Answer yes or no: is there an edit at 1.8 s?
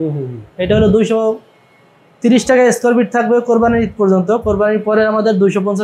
no